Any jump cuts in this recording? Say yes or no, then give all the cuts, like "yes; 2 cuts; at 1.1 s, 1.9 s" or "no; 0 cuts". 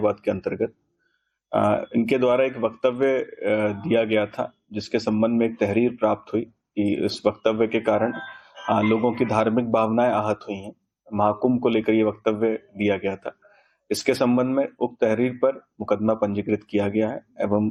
no; 0 cuts